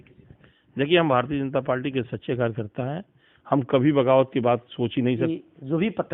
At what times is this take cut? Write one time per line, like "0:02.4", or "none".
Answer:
0:05.2